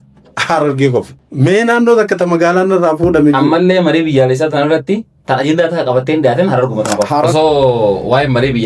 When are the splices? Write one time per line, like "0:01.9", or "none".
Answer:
0:01.2
0:07.3